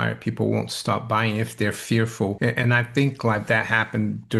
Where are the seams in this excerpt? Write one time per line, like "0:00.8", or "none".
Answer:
0:02.4